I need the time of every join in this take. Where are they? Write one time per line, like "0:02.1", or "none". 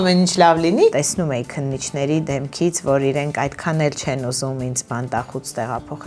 0:00.9